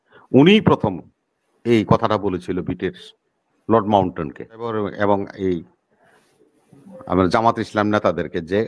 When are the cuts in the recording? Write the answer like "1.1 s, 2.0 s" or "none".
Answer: 4.7 s